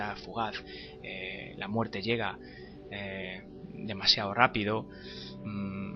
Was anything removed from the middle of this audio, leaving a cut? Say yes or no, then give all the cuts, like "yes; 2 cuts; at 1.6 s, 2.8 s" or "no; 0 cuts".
yes; 1 cut; at 3.1 s